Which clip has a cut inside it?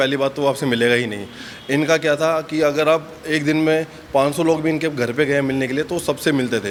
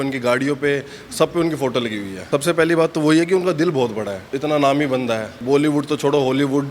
second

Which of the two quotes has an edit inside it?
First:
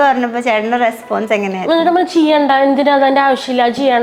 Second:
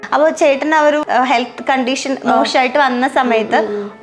second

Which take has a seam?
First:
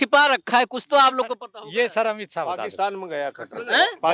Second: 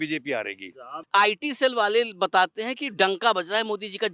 second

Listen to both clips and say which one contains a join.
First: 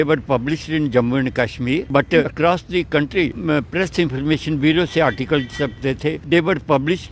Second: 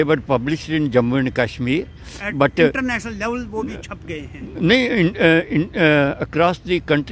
first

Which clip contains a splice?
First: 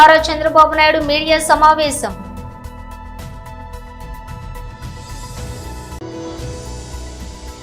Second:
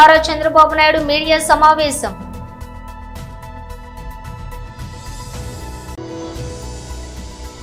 first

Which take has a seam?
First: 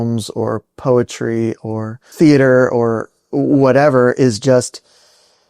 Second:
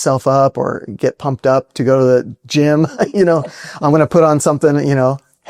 first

